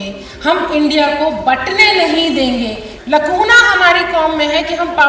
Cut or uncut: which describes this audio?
cut